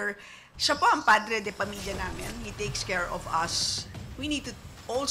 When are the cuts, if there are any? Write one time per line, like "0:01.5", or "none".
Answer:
none